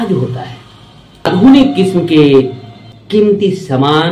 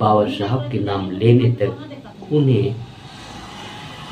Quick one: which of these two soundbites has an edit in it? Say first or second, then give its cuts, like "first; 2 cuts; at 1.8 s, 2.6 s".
first; 1 cut; at 1.3 s